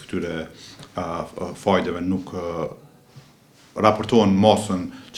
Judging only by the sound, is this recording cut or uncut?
uncut